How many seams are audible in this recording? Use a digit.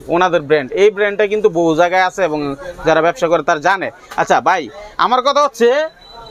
0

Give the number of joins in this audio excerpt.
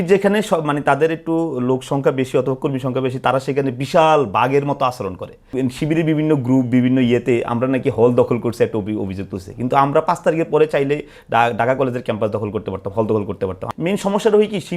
2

